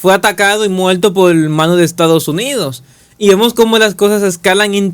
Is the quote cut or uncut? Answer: uncut